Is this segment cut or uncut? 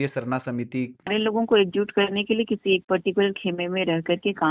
cut